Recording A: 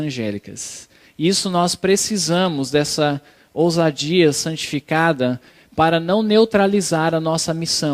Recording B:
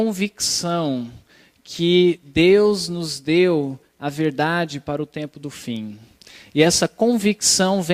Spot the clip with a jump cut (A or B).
B